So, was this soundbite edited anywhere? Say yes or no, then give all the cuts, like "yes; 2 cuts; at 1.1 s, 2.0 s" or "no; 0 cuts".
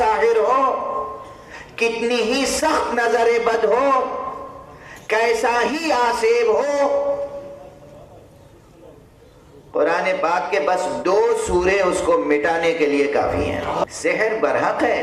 yes; 1 cut; at 13.9 s